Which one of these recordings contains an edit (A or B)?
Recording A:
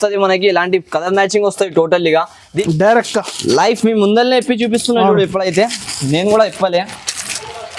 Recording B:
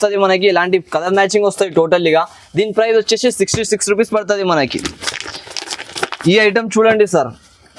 A